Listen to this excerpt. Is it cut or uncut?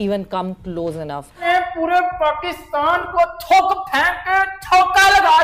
cut